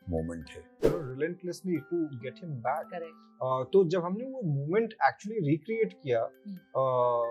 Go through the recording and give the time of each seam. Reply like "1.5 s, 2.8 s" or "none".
0.9 s